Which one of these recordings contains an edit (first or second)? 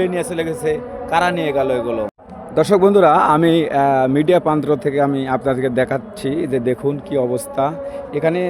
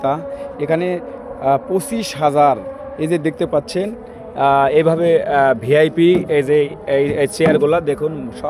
first